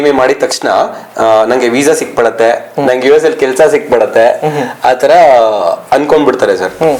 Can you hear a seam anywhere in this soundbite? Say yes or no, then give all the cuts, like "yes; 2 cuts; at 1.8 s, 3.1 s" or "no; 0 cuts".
no; 0 cuts